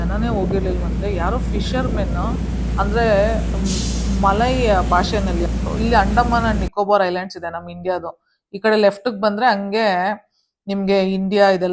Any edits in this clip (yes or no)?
yes